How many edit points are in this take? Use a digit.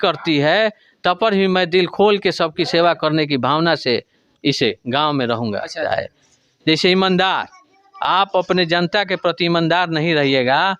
1